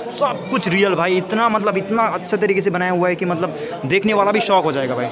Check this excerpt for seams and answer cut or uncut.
uncut